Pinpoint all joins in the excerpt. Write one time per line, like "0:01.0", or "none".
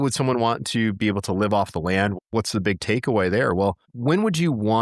0:02.2
0:03.9